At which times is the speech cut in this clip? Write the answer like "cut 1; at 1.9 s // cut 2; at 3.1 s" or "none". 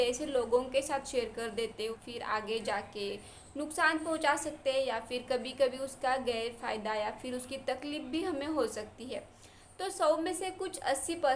cut 1; at 1.9 s